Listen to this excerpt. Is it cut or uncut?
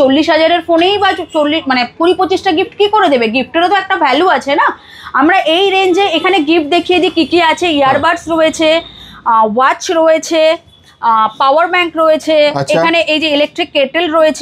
uncut